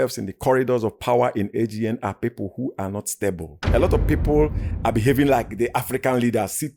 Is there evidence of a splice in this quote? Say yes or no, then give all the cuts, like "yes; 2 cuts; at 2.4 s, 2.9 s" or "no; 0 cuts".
no; 0 cuts